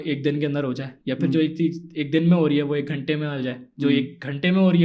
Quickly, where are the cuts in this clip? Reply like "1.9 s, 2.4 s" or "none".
none